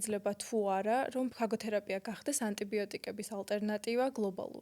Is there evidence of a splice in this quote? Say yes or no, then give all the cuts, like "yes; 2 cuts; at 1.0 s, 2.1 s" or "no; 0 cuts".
yes; 1 cut; at 1.3 s